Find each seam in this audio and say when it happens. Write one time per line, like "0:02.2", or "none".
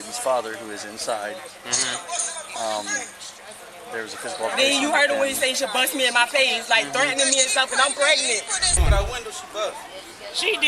0:08.8